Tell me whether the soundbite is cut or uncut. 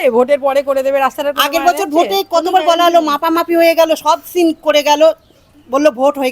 uncut